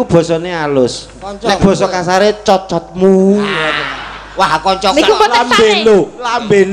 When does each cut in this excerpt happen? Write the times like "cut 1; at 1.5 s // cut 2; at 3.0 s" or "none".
none